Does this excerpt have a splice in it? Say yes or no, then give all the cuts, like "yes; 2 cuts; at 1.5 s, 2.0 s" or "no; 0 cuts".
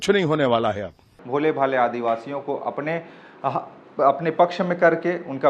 yes; 1 cut; at 1.2 s